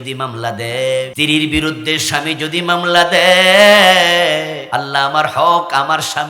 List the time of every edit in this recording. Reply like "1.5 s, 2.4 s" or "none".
1.1 s, 4.6 s